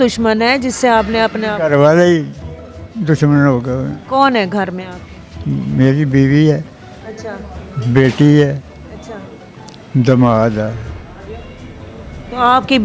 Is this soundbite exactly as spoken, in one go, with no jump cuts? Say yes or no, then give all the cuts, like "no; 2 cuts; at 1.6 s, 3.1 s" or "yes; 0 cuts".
yes; 0 cuts